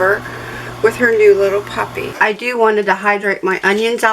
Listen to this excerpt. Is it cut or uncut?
cut